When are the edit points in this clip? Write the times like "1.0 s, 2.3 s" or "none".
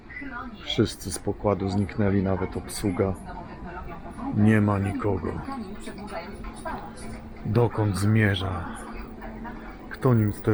none